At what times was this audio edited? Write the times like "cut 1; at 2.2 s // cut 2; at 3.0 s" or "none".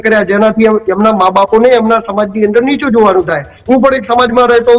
cut 1; at 3.5 s